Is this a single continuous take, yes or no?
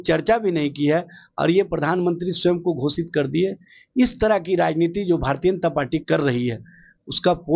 yes